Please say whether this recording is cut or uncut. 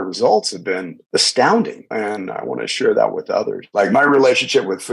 cut